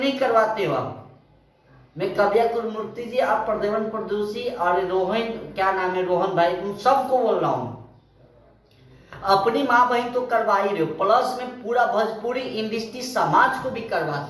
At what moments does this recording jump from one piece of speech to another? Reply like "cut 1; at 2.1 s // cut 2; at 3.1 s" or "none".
none